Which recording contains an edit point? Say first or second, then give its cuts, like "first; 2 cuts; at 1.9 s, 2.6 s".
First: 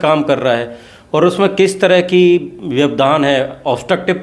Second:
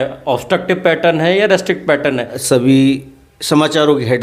second; 1 cut; at 2.3 s